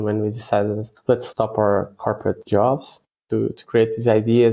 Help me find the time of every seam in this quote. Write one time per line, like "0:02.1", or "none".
0:01.0
0:02.4
0:03.2